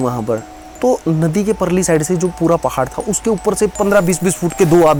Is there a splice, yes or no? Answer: no